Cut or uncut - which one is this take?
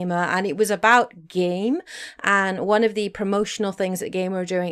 cut